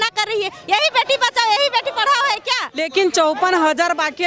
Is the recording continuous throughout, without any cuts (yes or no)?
no